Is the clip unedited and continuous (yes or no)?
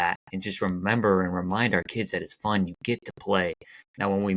yes